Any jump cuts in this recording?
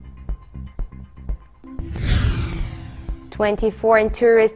no; 0 cuts

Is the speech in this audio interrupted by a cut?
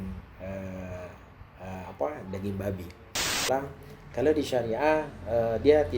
yes; 1 cut; at 3.4 s

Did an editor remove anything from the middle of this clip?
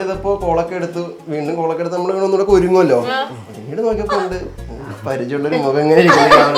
no; 0 cuts

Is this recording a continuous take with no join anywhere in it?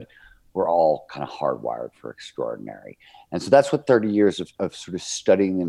yes; 0 cuts

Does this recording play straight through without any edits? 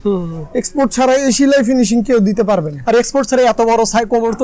yes; 0 cuts

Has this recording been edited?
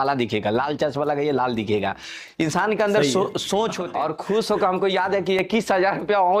yes; 1 cut; at 3.9 s

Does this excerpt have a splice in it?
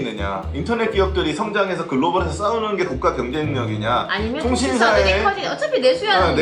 no; 0 cuts

